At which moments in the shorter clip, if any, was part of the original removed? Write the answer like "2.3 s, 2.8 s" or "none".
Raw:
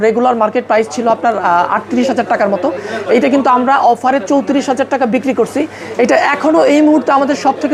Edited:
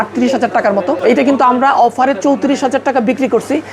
1.0 s